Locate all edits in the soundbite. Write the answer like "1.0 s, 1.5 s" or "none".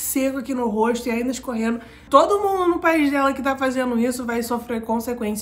2.0 s